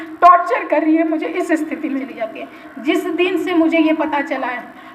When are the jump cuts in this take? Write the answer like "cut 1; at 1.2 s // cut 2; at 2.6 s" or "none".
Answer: cut 1; at 2.1 s